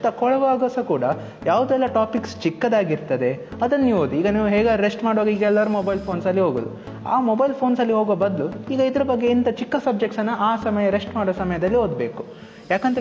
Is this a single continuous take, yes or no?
yes